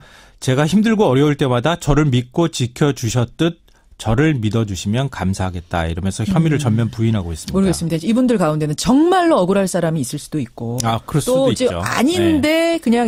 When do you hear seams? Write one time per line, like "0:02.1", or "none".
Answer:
none

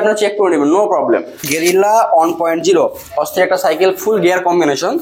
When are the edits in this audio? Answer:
0:01.4

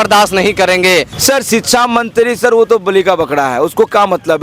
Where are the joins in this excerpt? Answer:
0:01.1

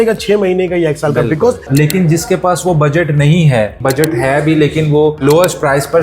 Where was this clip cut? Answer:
0:01.7
0:03.8

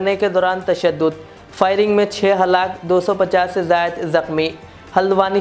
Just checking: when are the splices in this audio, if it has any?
none

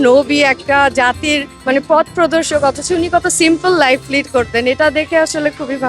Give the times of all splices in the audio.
0:01.5

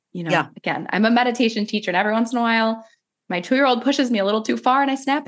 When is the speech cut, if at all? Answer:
none

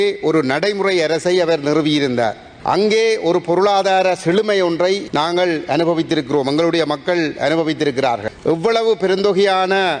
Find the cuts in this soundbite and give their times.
0:02.5
0:05.1
0:08.3

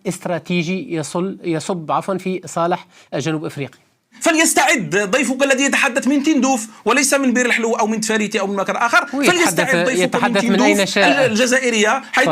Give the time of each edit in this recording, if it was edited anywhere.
0:04.1

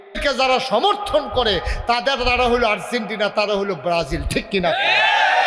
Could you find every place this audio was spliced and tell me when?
none

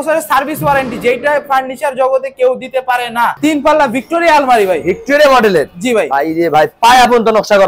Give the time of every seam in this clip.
0:03.4

